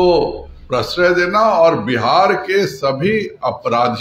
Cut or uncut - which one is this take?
uncut